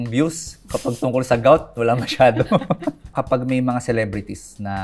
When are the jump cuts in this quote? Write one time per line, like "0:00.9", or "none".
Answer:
0:03.1